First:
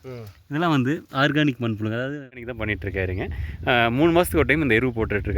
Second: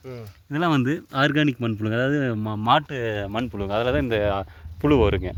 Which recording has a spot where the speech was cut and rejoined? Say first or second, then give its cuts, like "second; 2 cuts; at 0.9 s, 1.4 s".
first; 1 cut; at 2.5 s